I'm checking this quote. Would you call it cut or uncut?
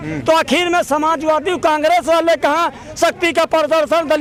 uncut